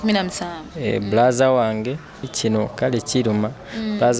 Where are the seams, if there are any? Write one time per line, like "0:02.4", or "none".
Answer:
0:02.2